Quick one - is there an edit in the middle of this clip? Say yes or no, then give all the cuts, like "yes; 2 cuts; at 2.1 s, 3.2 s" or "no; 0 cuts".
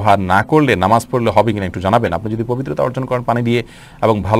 no; 0 cuts